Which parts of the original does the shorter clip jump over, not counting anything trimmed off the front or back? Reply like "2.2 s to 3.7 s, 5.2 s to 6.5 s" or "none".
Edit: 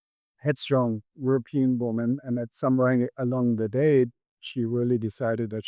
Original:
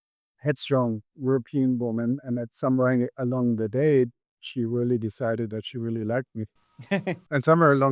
none